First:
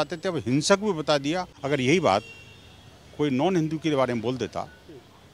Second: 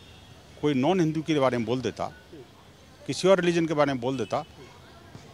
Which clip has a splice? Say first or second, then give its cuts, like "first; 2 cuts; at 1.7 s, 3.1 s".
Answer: first; 1 cut; at 1.5 s